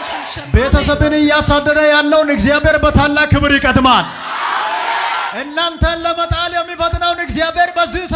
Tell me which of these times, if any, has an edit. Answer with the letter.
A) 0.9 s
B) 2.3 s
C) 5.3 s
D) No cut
C